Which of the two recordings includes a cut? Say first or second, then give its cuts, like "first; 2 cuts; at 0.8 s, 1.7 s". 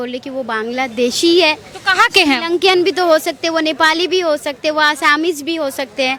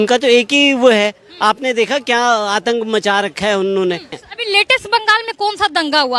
second; 1 cut; at 4.1 s